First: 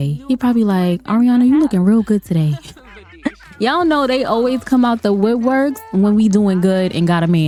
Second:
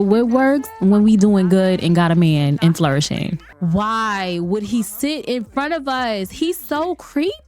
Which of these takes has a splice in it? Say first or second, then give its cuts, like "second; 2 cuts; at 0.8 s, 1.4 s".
second; 1 cut; at 3.5 s